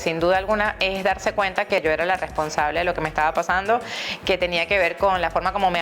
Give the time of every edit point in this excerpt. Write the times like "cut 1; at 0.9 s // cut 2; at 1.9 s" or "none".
cut 1; at 1.8 s